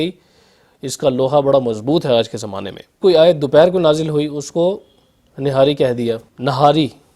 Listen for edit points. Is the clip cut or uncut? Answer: cut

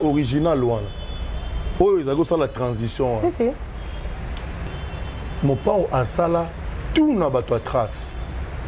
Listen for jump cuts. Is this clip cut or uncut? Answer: cut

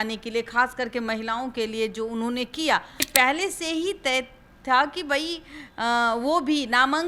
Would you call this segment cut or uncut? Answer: cut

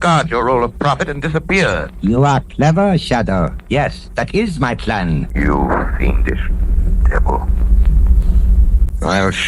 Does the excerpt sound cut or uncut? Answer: cut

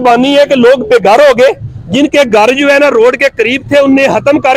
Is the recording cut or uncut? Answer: uncut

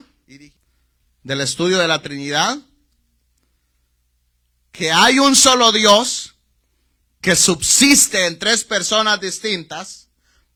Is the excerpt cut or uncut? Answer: uncut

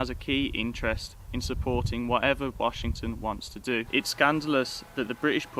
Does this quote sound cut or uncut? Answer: cut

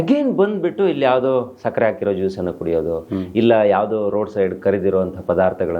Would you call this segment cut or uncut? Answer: uncut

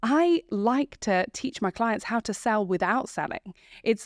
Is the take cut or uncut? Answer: uncut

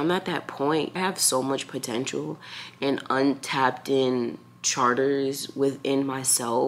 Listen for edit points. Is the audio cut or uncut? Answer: cut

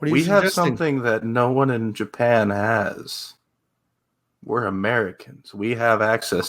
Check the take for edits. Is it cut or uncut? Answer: uncut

